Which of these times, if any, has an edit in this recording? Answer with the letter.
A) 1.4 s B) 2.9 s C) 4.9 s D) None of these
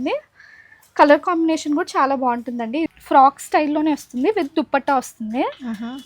B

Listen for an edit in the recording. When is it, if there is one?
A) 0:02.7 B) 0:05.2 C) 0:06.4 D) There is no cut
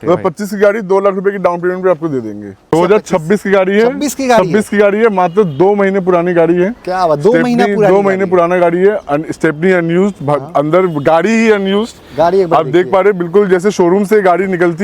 A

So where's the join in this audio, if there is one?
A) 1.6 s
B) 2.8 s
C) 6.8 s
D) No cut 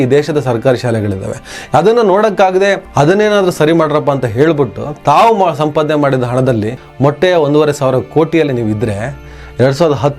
C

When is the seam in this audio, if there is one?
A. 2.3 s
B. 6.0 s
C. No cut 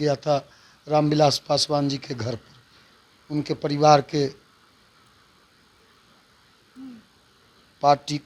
C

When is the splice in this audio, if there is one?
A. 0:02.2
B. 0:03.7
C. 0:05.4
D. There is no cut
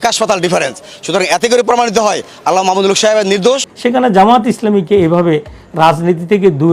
B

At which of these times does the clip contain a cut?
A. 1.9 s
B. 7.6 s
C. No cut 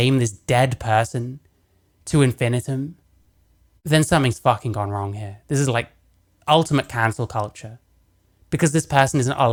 C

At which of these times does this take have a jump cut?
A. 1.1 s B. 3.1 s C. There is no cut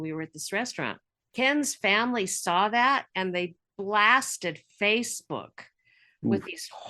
A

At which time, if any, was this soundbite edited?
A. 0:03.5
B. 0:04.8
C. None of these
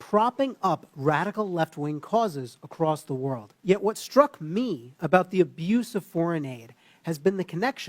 A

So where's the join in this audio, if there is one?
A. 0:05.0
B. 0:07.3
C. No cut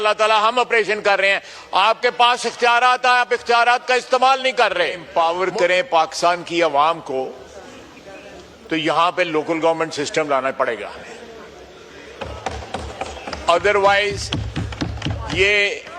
A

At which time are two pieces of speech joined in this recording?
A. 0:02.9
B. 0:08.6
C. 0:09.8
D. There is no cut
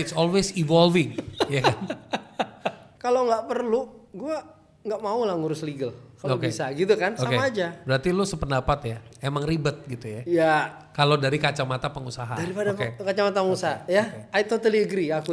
A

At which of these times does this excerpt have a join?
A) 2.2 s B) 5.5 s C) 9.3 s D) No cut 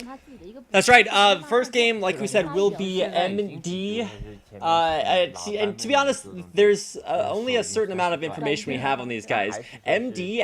A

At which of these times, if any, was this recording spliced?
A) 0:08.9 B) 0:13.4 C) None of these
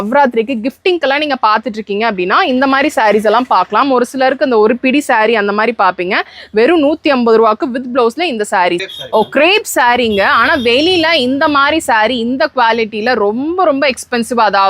A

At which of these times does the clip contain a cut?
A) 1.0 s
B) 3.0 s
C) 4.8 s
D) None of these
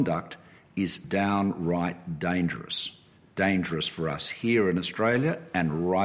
A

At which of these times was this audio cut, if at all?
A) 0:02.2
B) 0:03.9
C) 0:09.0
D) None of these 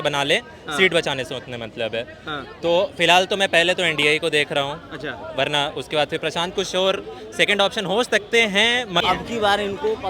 C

